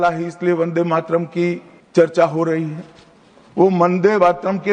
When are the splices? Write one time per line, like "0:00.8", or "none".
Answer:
0:01.7

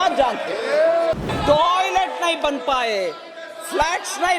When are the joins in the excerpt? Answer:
0:01.2

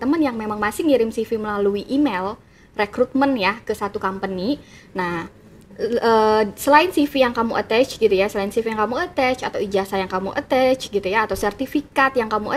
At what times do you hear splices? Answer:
none

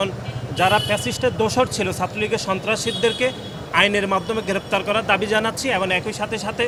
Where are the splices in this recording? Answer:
none

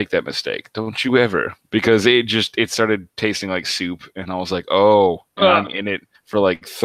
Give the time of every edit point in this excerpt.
0:01.6

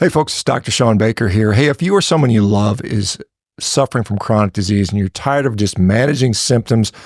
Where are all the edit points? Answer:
none

